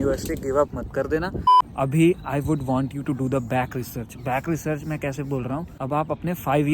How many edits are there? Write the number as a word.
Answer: two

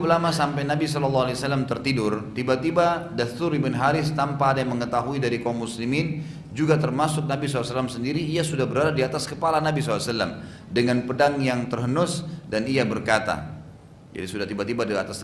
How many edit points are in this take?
zero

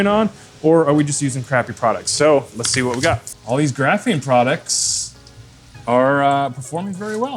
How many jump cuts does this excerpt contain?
one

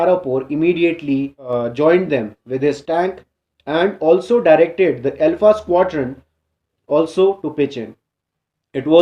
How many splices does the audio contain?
one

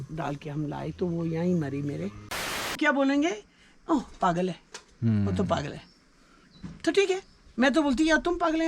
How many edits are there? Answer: one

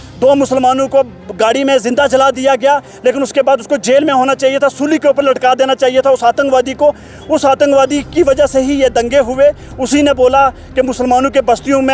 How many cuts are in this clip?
zero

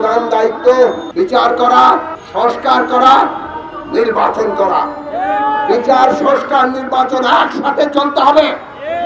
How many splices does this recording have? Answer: two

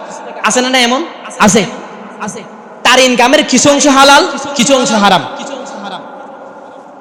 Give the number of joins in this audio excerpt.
zero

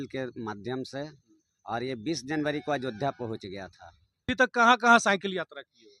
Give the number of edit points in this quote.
one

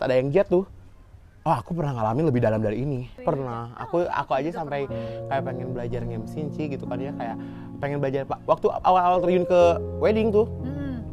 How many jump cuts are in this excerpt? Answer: one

